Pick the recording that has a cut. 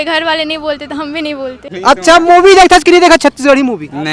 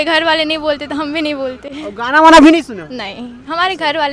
first; 1 cut; at 1.7 s

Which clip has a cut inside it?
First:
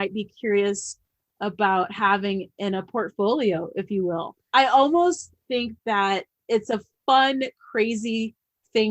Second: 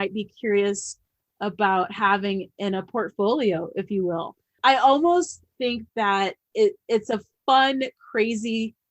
first; 2 cuts; at 4.3 s, 6.4 s

